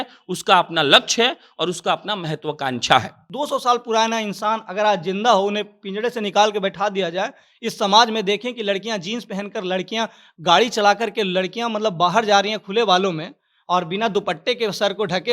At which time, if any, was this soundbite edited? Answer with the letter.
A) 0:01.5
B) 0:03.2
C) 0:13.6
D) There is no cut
B